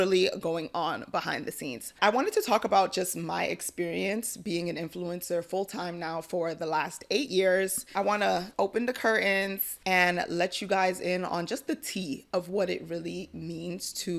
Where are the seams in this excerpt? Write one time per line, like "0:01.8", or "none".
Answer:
0:01.9
0:08.0
0:09.7